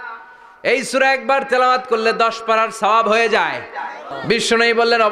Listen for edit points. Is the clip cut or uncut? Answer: cut